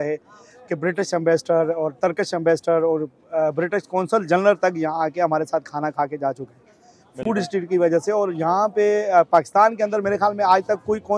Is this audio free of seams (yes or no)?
yes